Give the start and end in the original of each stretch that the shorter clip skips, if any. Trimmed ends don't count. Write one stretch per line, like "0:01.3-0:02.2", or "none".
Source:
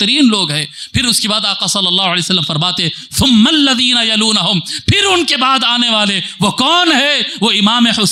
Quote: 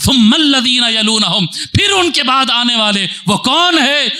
none